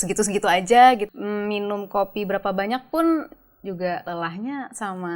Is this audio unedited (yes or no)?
no